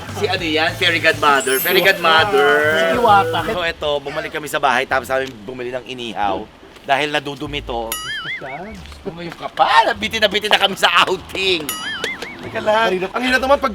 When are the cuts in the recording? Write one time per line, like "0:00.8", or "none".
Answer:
0:03.5